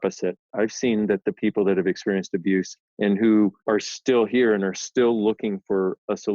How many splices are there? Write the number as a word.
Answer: two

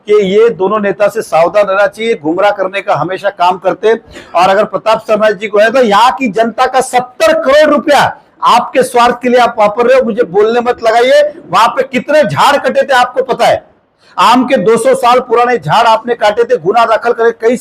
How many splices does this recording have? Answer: one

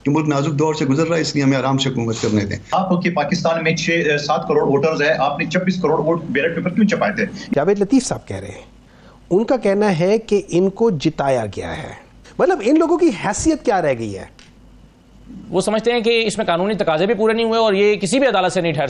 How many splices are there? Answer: four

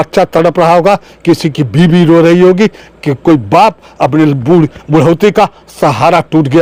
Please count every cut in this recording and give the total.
zero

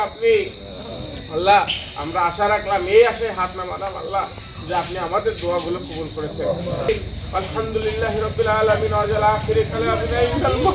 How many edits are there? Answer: one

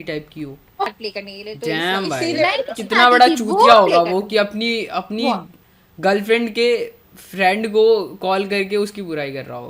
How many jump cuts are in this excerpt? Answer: one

